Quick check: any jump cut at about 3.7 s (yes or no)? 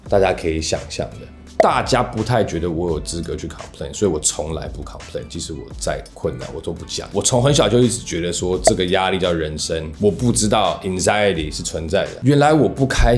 no